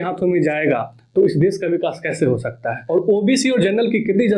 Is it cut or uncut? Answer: cut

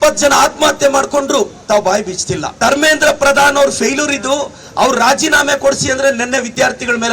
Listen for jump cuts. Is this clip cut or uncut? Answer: cut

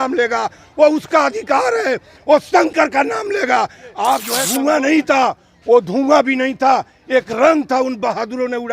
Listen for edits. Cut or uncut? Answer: cut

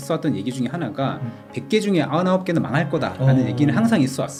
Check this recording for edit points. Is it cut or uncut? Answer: uncut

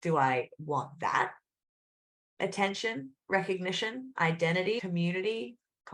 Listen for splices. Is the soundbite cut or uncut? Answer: cut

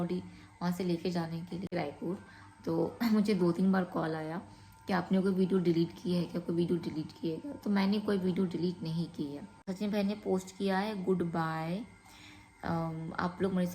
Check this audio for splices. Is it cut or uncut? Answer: cut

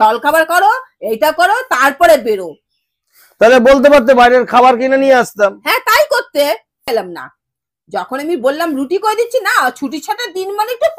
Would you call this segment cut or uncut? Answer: cut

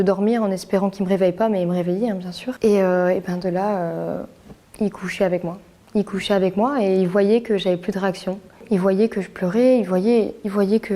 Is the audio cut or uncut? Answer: uncut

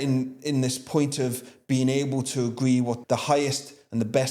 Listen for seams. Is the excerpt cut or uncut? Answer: cut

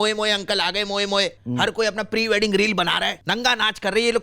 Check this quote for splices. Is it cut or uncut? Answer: cut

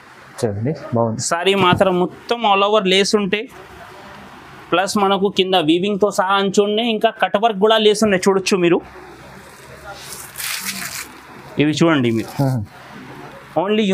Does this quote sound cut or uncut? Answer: uncut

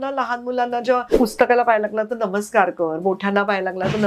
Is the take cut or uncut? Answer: cut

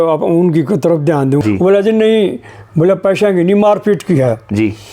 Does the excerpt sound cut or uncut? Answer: cut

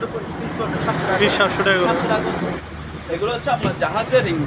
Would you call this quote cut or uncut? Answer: cut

